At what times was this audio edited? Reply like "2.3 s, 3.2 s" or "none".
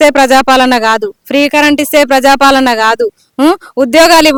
none